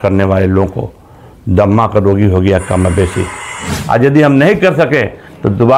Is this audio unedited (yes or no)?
no